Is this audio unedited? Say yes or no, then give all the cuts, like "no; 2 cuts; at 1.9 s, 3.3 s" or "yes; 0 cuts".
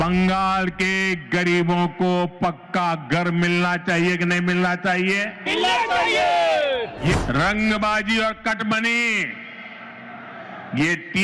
no; 1 cut; at 7.2 s